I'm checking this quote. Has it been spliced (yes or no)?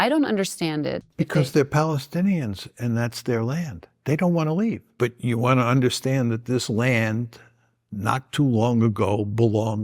yes